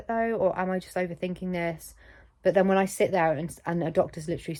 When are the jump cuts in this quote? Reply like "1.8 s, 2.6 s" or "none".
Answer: none